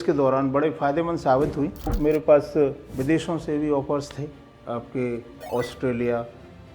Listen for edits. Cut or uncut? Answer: cut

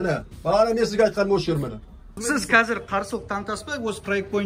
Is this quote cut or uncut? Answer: cut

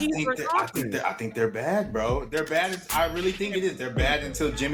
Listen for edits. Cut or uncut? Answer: uncut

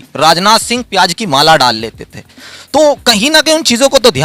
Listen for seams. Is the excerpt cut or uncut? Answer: uncut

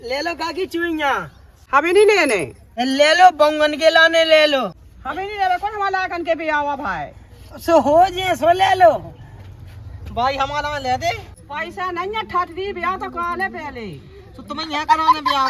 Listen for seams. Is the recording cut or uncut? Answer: uncut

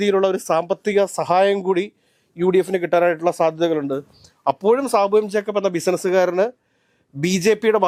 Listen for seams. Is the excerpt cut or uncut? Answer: uncut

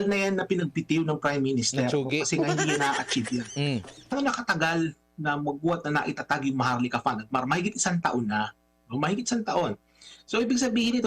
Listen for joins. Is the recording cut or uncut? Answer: cut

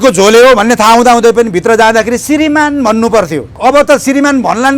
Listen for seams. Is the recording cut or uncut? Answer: cut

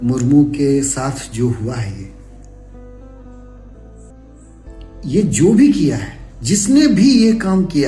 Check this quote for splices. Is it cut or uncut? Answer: cut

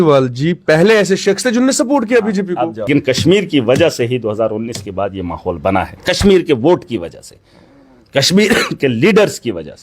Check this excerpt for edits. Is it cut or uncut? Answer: cut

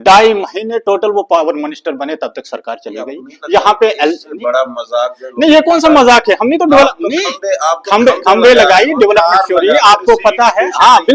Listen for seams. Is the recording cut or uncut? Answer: uncut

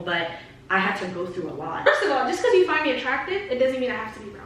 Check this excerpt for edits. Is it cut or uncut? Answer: cut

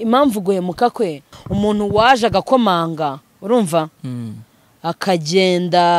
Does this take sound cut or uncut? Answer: cut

